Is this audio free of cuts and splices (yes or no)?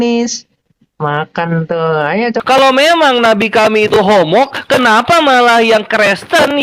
no